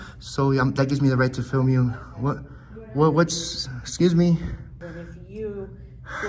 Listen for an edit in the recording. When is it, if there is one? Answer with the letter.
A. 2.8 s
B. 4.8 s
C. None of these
B